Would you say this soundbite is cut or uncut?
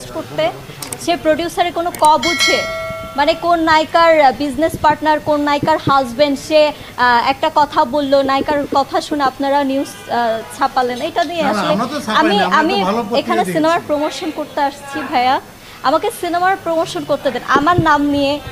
uncut